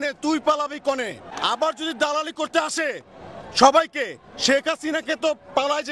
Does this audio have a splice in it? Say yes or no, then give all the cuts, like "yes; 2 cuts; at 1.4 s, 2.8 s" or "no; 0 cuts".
yes; 1 cut; at 1.3 s